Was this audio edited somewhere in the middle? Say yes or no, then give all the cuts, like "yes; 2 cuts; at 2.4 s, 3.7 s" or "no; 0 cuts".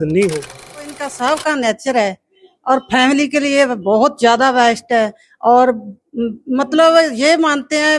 yes; 1 cut; at 1.1 s